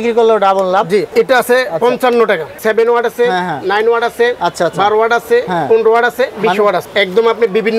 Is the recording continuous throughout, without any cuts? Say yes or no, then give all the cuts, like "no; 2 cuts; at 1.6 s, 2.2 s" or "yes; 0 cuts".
no; 3 cuts; at 1.1 s, 2.6 s, 6.8 s